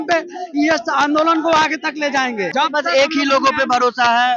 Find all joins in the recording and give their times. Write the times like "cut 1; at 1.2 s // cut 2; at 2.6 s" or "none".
cut 1; at 2.5 s